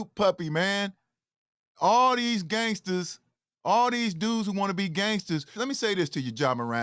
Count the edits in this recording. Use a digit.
1